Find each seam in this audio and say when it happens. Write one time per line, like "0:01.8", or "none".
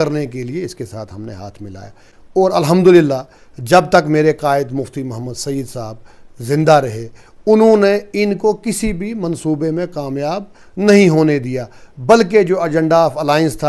none